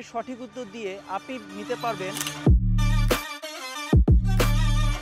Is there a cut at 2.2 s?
yes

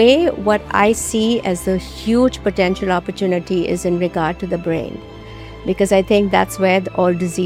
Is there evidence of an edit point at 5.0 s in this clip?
no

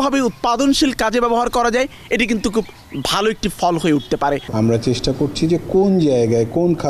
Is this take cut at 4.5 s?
yes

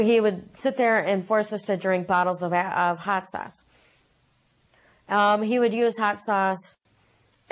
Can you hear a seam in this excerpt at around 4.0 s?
no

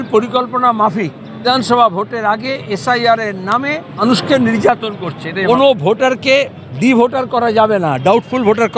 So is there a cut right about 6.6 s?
no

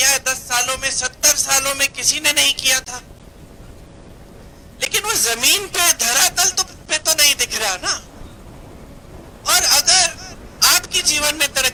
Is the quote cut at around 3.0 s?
no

